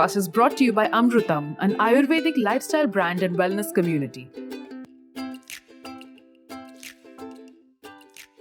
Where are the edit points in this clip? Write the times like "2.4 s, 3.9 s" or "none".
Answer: 4.1 s